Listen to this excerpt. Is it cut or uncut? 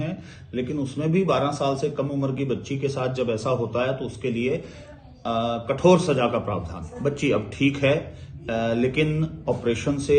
cut